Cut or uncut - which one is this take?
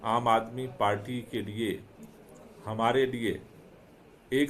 uncut